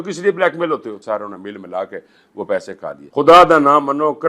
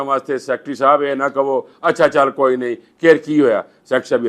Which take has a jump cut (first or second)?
first